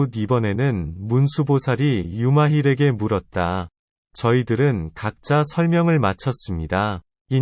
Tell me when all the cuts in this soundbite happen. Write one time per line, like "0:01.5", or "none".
none